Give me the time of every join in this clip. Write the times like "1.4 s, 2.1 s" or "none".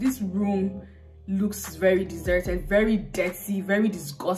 none